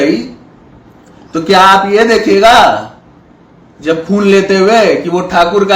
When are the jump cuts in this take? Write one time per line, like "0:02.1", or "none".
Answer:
none